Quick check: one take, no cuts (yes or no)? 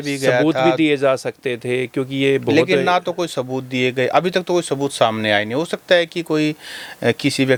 yes